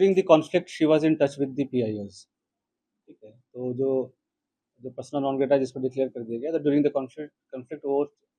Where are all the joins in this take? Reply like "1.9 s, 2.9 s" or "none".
none

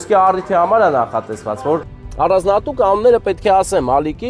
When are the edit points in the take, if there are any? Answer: 2.0 s

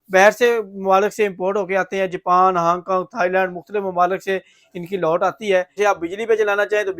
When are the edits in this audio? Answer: 5.8 s

